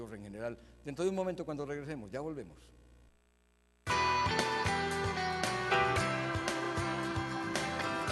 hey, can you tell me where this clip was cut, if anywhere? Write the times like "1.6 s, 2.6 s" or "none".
none